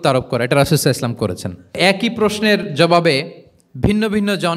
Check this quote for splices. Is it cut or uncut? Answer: cut